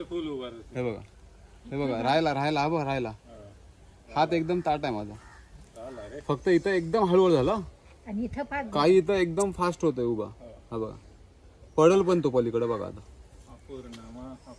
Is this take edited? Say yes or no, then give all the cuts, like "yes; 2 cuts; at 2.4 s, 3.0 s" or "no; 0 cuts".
no; 0 cuts